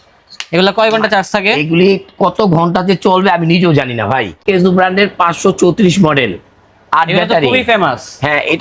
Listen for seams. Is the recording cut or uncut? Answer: cut